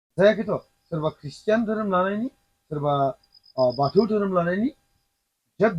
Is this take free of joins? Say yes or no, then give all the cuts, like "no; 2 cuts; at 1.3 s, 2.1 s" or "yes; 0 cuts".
yes; 0 cuts